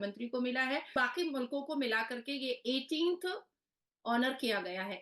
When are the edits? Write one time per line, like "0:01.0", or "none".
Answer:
0:00.9